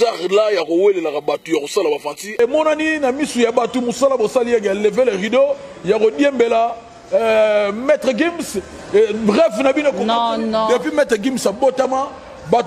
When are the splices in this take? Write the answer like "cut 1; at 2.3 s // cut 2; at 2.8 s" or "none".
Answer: cut 1; at 2.4 s